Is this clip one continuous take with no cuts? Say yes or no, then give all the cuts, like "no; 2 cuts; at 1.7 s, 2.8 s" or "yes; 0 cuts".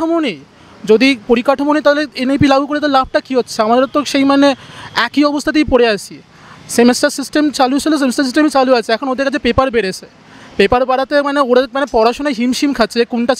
yes; 0 cuts